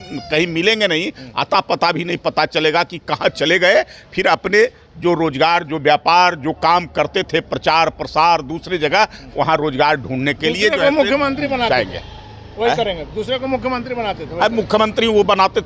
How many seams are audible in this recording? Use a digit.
0